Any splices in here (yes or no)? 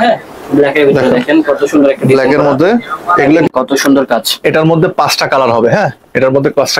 yes